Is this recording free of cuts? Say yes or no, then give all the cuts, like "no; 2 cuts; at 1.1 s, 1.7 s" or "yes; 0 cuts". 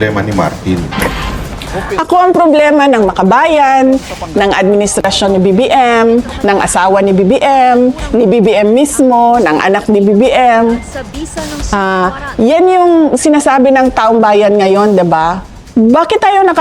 yes; 0 cuts